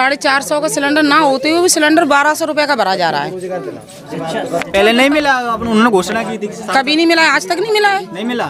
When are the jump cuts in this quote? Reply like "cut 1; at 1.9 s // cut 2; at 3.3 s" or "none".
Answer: none